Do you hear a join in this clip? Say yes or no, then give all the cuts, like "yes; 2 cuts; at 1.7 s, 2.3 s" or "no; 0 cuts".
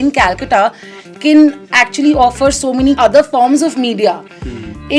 yes; 1 cut; at 3.0 s